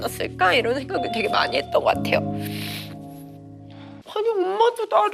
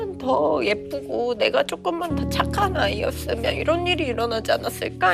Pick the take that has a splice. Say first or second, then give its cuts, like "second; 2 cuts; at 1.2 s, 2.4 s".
first; 1 cut; at 4.0 s